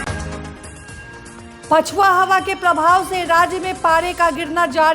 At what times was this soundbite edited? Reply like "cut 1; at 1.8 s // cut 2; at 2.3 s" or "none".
cut 1; at 1.6 s